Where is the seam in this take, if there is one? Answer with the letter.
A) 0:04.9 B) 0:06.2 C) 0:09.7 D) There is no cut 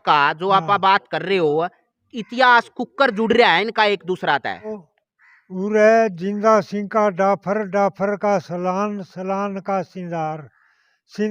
A